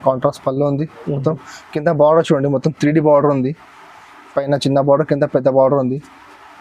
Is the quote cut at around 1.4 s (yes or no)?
no